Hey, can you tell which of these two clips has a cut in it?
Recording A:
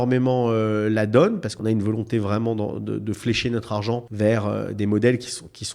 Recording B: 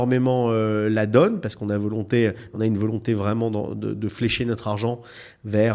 A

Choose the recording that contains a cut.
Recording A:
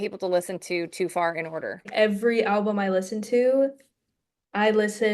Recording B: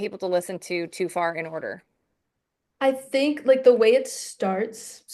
A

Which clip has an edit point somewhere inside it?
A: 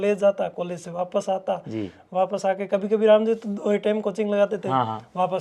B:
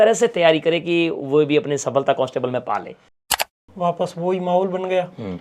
B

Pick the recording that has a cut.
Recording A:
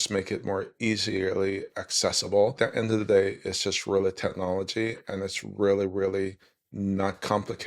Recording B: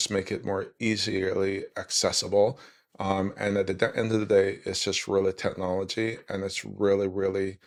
A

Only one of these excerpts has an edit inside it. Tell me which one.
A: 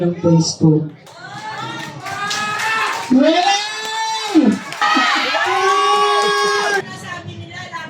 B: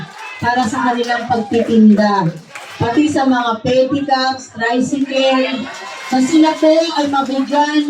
A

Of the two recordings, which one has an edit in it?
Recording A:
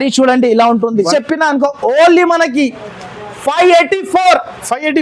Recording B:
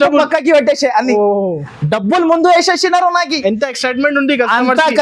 A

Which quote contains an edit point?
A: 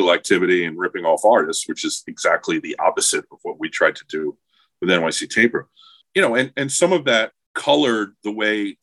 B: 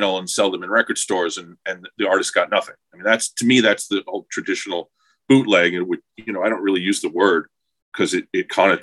A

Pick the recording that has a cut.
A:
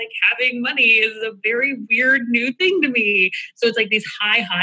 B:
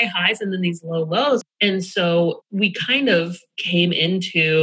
B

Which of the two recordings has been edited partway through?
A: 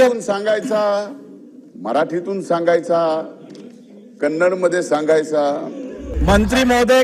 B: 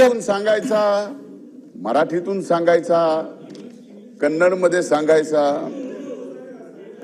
A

